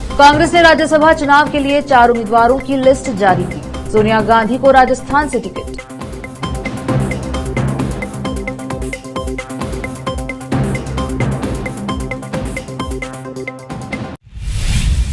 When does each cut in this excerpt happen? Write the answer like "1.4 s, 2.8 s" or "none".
14.1 s